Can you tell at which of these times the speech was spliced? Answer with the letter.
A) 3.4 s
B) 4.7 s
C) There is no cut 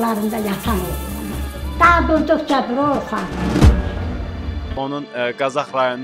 B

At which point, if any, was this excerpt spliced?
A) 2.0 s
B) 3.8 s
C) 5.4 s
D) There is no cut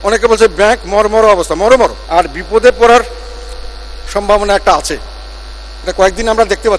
A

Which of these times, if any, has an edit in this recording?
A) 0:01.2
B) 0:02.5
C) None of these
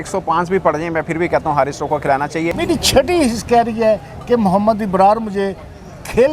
B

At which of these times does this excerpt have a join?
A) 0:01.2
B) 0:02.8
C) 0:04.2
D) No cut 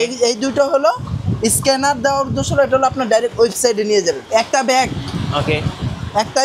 C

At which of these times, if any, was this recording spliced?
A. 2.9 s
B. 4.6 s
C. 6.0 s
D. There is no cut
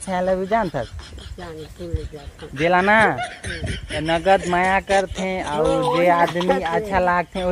D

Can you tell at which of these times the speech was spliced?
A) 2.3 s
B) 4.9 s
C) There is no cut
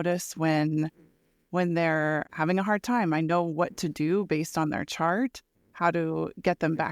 A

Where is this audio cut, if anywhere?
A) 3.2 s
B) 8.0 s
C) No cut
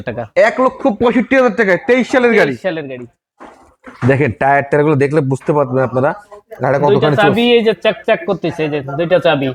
C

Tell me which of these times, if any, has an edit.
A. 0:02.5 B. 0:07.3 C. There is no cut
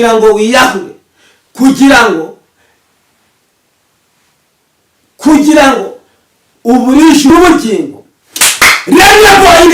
B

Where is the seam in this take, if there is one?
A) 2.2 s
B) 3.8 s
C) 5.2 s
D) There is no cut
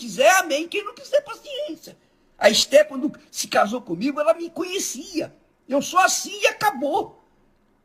B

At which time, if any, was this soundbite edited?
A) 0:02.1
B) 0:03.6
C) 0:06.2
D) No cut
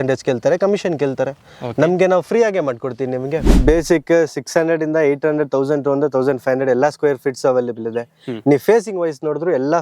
B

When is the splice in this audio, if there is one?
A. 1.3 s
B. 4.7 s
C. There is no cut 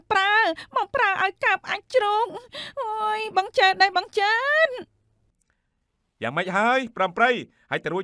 C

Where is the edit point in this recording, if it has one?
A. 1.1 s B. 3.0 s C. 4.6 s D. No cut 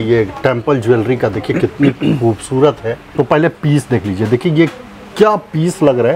B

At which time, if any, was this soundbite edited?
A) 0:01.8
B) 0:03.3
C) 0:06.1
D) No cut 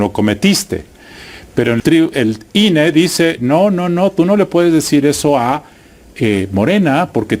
A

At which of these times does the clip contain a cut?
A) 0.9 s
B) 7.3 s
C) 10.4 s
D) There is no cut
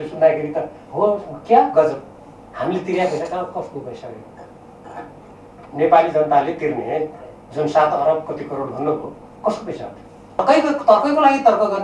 C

